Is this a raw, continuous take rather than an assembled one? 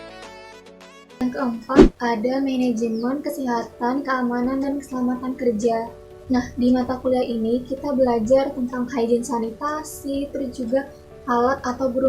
yes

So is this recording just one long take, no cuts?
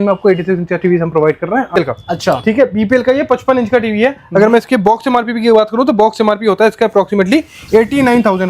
no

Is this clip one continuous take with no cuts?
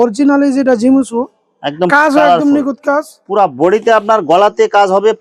yes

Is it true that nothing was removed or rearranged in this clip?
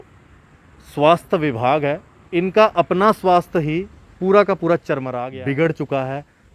no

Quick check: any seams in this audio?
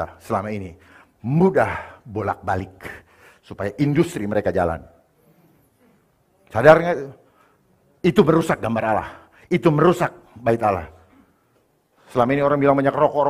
no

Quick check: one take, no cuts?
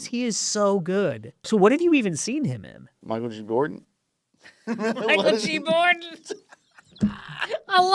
no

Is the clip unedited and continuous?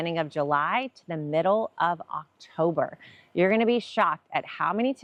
yes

